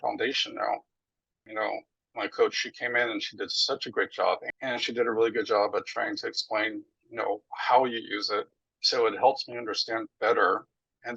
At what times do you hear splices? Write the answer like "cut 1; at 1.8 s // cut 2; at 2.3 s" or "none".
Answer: cut 1; at 1.5 s // cut 2; at 4.4 s